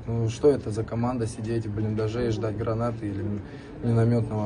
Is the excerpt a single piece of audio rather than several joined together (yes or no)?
yes